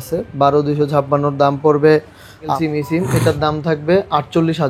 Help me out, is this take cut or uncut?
cut